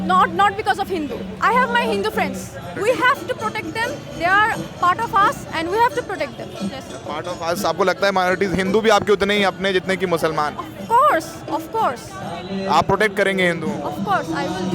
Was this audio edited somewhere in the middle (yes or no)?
yes